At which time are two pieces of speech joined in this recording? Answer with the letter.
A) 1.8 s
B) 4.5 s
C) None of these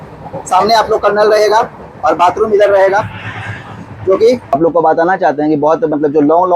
B